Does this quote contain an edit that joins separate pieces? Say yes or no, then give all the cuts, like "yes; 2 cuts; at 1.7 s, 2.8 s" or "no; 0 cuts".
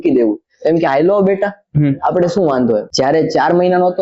yes; 1 cut; at 2.9 s